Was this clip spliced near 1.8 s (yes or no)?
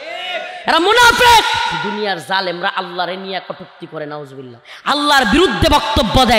yes